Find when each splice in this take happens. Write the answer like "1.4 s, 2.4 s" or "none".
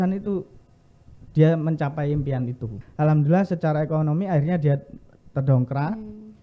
2.7 s